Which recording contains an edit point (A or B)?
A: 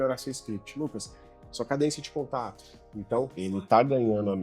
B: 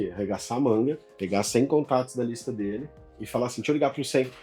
A